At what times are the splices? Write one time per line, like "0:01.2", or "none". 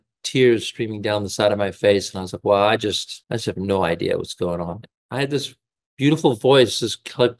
0:03.1
0:04.8